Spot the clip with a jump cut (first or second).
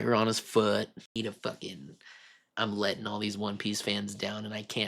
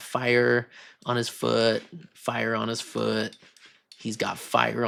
first